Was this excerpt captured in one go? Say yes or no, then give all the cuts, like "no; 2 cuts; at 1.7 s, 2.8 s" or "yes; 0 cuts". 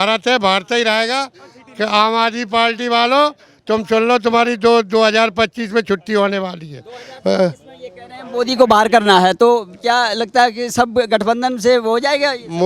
yes; 0 cuts